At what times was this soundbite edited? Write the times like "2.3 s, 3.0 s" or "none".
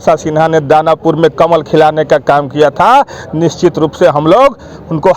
none